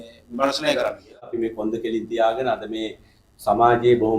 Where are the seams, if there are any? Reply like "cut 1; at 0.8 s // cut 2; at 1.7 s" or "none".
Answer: cut 1; at 1.3 s